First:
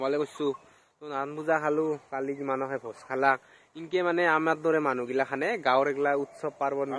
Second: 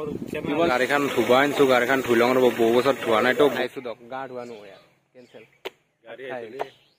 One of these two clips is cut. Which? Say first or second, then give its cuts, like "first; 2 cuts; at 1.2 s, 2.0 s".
second; 2 cuts; at 0.7 s, 3.6 s